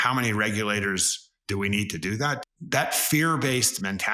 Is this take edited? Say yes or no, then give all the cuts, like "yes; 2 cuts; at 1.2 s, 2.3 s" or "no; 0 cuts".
yes; 1 cut; at 2.4 s